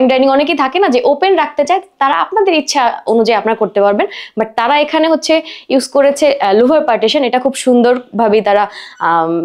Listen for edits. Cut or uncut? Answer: uncut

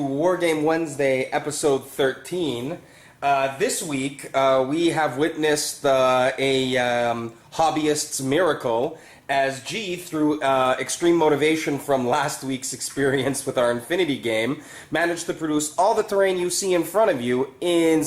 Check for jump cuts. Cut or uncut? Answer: uncut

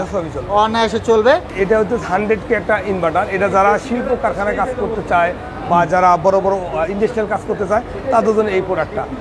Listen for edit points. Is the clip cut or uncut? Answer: uncut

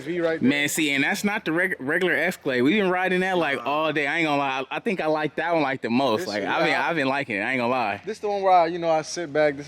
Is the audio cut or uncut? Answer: uncut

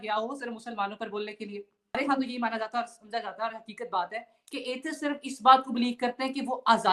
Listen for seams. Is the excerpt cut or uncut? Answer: cut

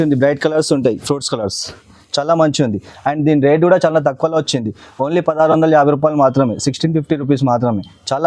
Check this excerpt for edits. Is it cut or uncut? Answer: uncut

